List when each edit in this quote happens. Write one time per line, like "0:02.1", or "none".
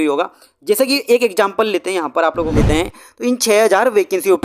0:02.5